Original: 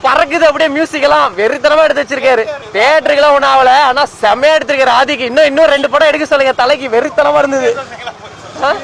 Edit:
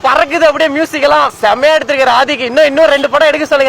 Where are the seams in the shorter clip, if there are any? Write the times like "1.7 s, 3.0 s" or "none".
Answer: 1.3 s